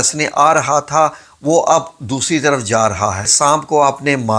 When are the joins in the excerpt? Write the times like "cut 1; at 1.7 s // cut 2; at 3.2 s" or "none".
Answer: cut 1; at 3.3 s